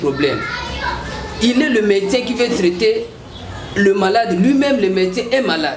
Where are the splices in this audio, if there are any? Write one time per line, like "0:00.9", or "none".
none